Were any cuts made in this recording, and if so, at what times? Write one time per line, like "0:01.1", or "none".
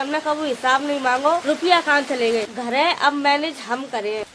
0:02.5